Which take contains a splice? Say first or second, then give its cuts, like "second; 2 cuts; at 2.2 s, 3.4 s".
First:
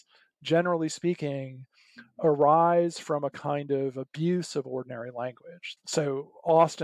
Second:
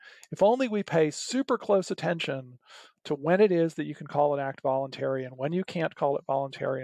first; 1 cut; at 5.6 s